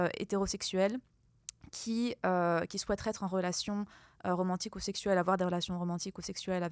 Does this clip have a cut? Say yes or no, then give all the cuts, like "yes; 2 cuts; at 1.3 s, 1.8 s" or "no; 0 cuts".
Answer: no; 0 cuts